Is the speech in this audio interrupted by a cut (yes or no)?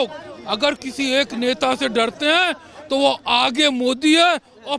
no